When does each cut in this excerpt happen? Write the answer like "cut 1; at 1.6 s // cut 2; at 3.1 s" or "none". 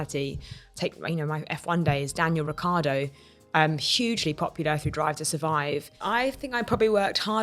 cut 1; at 5.9 s